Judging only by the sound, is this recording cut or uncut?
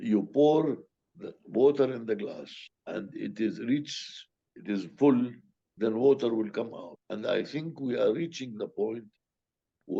uncut